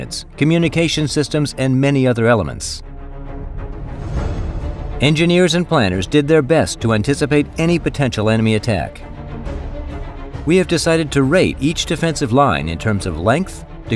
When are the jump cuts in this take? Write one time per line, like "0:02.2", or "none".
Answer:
0:01.6